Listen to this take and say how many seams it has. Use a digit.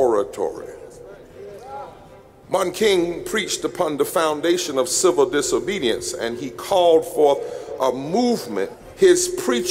1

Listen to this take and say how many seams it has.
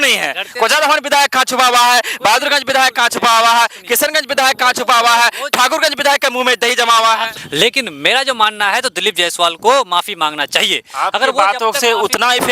1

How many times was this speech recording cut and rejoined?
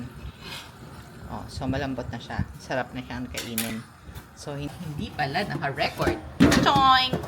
1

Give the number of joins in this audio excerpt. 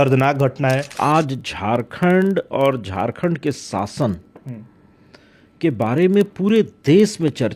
1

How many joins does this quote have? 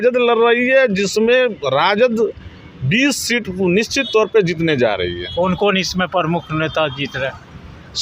0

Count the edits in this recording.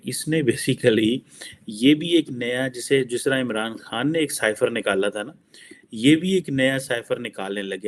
0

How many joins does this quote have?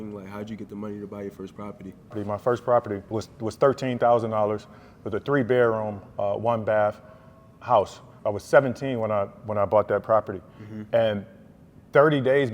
3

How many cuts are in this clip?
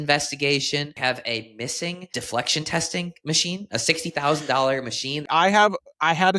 3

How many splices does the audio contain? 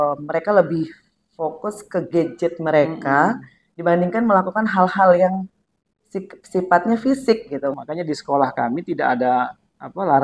1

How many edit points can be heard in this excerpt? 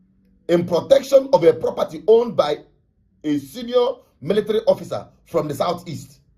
0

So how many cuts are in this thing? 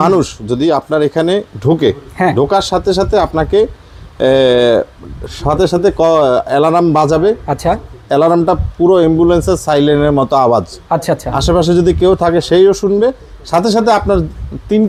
0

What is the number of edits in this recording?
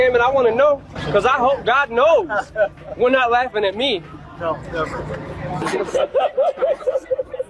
0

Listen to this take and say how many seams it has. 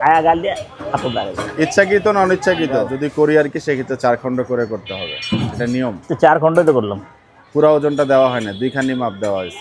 1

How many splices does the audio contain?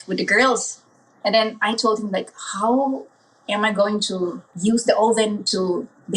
1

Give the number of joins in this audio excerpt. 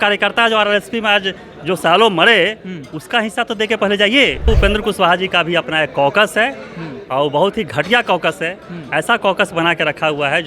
1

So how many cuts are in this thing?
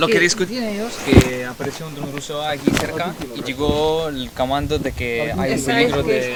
0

